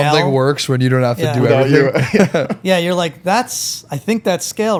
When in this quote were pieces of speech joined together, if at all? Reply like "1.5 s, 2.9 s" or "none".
none